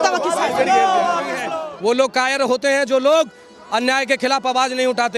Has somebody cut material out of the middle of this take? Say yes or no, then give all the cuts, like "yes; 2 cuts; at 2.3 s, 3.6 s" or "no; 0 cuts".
yes; 1 cut; at 1.4 s